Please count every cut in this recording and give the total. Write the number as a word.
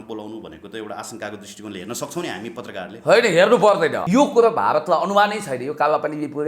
one